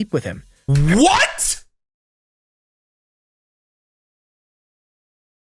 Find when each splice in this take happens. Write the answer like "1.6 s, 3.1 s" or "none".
none